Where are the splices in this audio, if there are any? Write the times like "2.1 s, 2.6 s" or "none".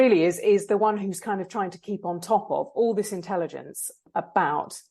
4.0 s

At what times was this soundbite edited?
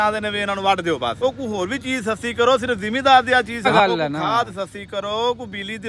1.2 s, 3.7 s

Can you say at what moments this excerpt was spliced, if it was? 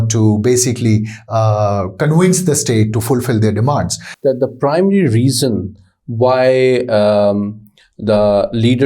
4.0 s

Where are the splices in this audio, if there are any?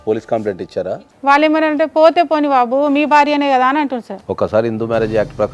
0.9 s, 4.1 s

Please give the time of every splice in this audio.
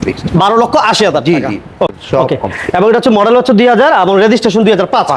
1.9 s

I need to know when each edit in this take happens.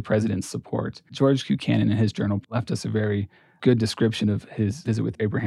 1.1 s

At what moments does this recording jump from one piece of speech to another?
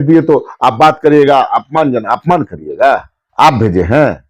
3.2 s

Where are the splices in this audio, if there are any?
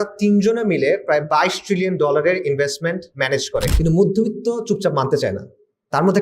3.7 s

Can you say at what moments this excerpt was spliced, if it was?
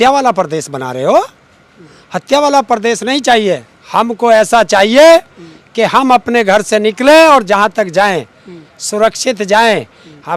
none

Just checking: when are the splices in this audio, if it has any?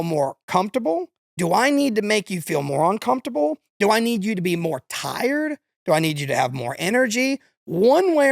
1.2 s

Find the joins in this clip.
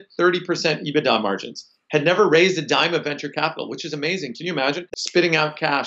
4.8 s

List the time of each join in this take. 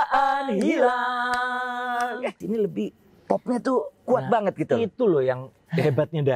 2.4 s

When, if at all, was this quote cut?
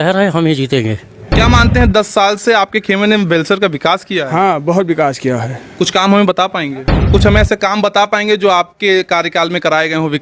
1.2 s, 6.9 s

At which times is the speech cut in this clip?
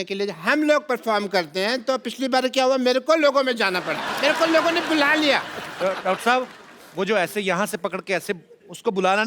4.0 s

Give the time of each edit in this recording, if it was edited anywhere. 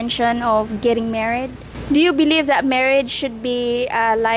1.8 s

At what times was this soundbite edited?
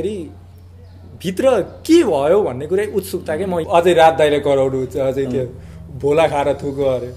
3.6 s

